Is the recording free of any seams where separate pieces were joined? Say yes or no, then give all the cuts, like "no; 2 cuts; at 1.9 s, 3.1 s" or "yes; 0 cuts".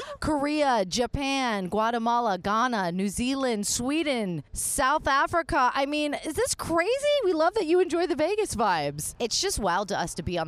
no; 1 cut; at 9.1 s